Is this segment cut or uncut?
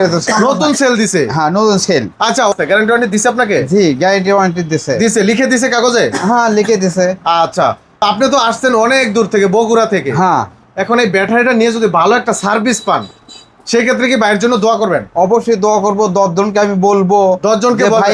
cut